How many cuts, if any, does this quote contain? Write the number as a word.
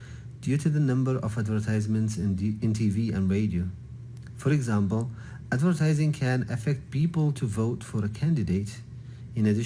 three